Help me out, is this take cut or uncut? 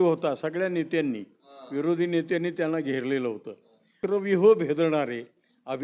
cut